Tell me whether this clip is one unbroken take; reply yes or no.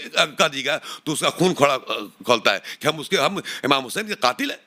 yes